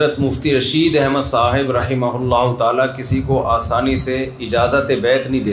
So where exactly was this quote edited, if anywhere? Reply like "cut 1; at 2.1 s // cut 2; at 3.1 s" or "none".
none